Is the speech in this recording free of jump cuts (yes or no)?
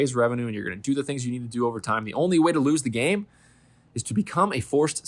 yes